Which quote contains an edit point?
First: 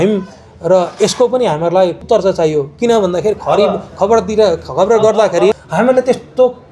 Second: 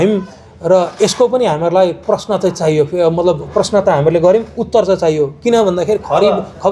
first; 2 cuts; at 2.0 s, 5.6 s

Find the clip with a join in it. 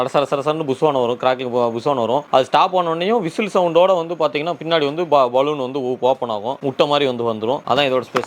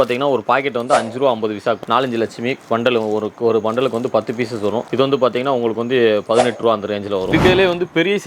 second; 2 cuts; at 1.8 s, 7.3 s

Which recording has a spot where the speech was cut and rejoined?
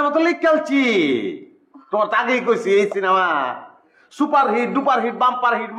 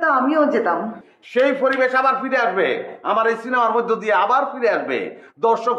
second; 1 cut; at 1.0 s

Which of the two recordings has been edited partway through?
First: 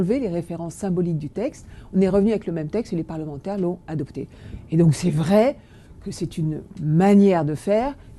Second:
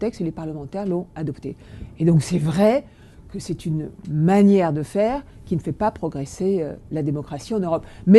first; 1 cut; at 1.1 s

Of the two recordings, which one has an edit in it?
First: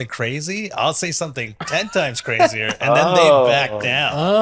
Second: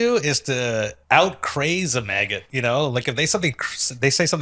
second; 2 cuts; at 1.0 s, 2.4 s

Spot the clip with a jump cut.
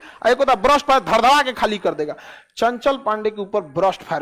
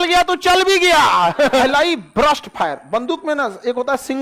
second; 1 cut; at 1.6 s

